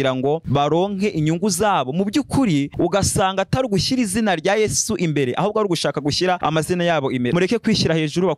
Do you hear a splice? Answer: yes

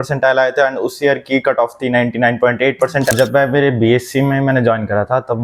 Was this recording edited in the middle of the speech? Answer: yes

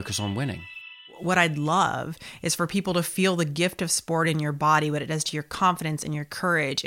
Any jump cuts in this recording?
yes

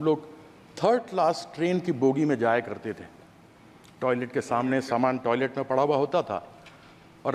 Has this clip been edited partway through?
no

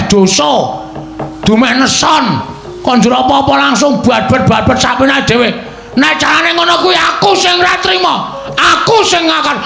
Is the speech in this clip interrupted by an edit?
no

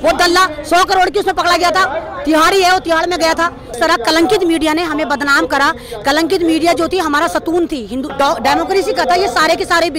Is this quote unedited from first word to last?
no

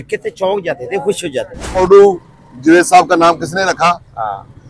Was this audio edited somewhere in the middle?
yes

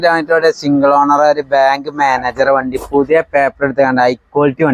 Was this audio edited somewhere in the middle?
no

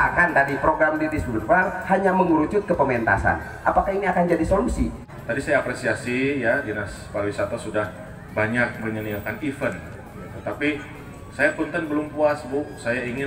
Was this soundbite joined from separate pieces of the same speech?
yes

